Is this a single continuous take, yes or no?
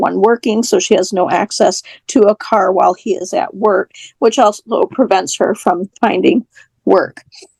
yes